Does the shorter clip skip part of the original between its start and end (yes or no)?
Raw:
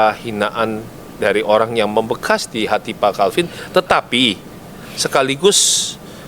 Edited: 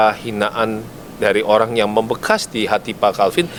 no